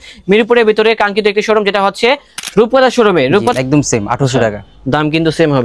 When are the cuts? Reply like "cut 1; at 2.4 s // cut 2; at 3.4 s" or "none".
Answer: cut 1; at 2.3 s // cut 2; at 3.5 s